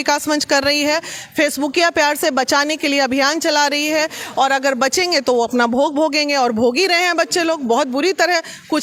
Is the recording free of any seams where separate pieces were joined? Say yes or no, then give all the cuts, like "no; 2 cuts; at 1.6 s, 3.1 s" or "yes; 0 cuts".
yes; 0 cuts